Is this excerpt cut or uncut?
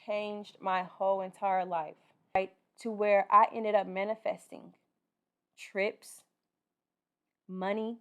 cut